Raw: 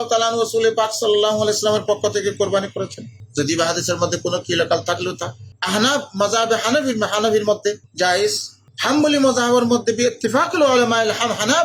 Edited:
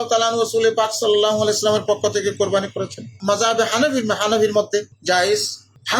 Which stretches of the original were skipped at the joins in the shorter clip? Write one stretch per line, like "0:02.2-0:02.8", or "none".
0:03.2-0:06.1